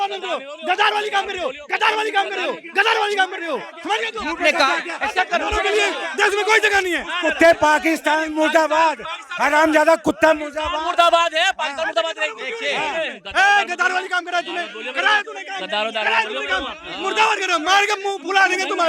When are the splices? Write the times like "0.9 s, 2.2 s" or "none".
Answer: none

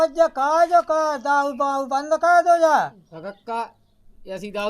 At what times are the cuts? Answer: 2.8 s

